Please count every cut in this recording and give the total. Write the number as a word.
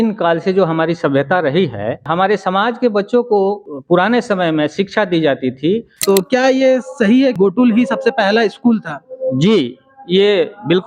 four